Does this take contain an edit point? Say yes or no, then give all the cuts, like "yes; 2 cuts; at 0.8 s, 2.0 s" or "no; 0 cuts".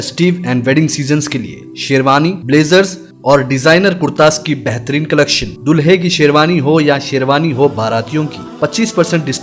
no; 0 cuts